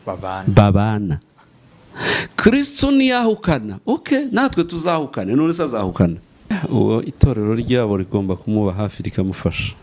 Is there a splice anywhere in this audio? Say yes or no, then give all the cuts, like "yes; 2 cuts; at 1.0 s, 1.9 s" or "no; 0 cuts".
yes; 1 cut; at 6.5 s